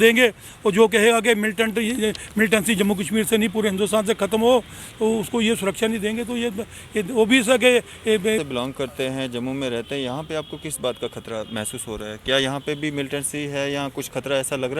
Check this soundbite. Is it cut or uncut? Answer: cut